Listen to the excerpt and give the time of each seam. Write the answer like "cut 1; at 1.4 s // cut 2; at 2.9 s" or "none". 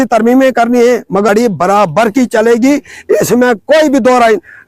cut 1; at 1.3 s